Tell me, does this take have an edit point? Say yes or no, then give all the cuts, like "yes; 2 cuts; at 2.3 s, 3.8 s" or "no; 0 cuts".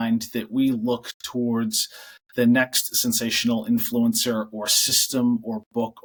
no; 0 cuts